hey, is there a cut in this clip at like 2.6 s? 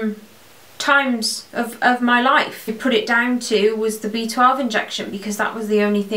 yes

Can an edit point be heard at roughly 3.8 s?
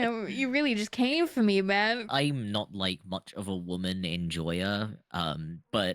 no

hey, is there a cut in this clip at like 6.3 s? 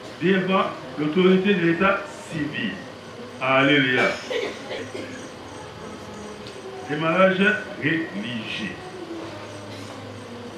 no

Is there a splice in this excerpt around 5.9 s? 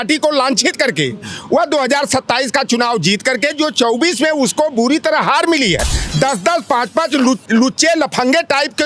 yes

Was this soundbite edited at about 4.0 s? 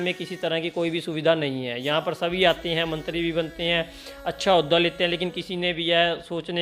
no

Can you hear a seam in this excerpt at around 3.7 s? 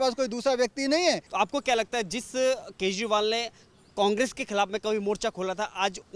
no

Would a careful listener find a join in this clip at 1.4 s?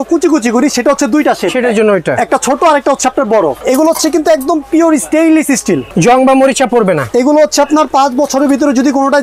no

